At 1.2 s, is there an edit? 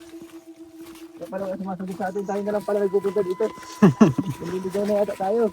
yes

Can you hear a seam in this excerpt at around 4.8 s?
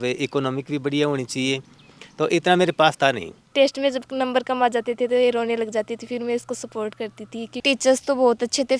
no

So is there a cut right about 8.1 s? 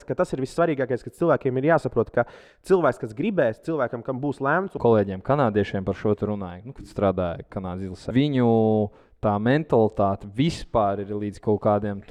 yes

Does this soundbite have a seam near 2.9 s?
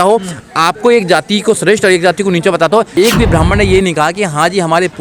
yes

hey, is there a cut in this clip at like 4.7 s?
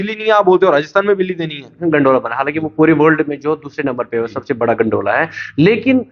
no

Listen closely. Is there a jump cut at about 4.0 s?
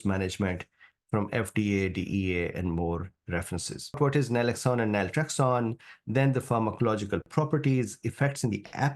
yes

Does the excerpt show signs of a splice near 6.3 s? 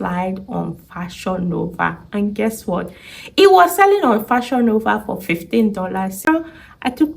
yes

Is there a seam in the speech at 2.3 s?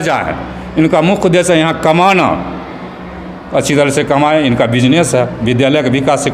no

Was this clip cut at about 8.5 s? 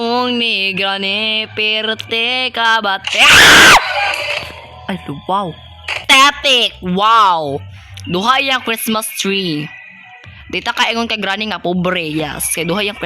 no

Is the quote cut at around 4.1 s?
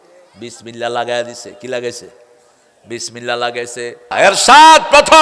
yes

